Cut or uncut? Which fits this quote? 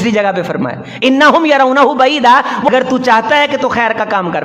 cut